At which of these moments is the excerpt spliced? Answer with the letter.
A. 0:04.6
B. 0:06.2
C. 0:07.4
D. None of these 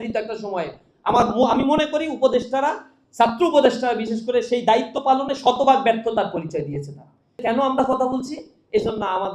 C